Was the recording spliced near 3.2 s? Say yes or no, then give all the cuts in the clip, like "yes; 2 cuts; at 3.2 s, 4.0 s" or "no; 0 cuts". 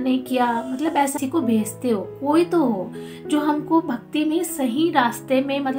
no; 1 cut; at 1.1 s